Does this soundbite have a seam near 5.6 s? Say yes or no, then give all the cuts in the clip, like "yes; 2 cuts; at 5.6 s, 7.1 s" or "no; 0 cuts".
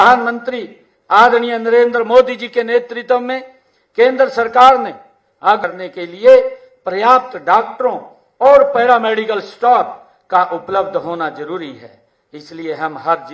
yes; 1 cut; at 5.6 s